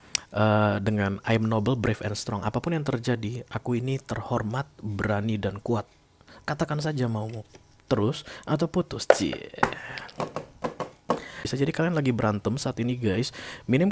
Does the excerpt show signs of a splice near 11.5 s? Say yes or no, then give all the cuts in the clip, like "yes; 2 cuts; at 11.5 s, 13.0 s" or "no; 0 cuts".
yes; 1 cut; at 11.5 s